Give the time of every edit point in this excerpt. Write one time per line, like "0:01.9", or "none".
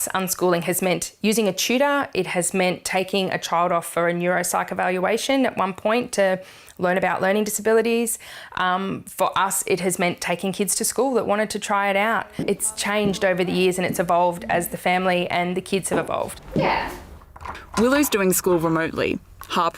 none